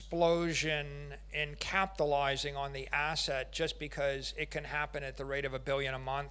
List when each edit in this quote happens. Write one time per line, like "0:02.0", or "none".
none